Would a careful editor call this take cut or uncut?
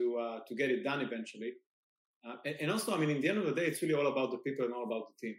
uncut